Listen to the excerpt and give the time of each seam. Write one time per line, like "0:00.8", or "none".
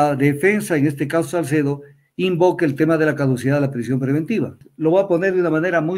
0:04.6